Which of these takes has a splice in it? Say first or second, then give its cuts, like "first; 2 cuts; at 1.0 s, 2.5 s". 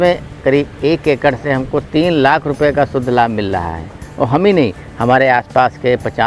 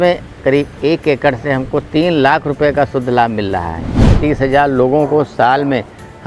second; 1 cut; at 4.0 s